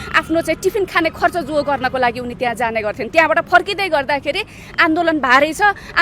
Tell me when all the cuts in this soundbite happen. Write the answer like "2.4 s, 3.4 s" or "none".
none